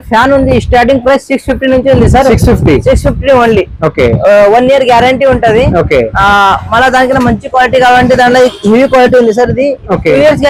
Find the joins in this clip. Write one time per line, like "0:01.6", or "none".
none